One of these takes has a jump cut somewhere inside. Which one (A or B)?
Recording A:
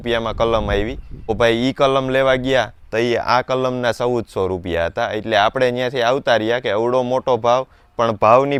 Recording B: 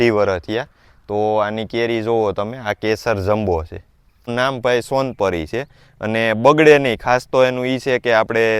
B